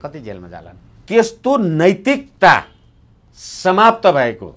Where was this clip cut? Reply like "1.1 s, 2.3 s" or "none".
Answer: 1.0 s